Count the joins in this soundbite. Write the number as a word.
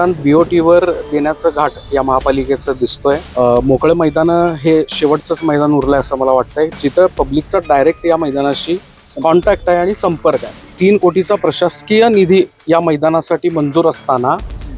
two